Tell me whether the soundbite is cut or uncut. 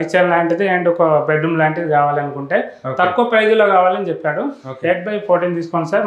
uncut